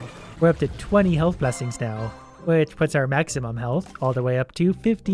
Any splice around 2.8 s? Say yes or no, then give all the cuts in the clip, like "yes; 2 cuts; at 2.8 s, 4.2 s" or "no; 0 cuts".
no; 0 cuts